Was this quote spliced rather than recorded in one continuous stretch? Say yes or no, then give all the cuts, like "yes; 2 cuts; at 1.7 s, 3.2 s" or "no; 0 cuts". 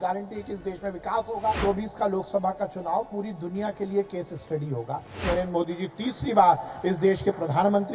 yes; 2 cuts; at 1.6 s, 5.2 s